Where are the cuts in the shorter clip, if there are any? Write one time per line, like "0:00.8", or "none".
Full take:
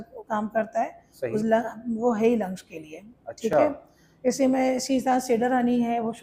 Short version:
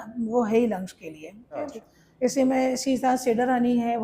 0:01.7